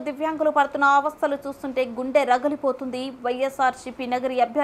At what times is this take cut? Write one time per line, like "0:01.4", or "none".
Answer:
none